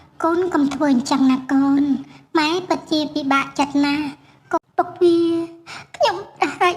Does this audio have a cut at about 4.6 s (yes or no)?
yes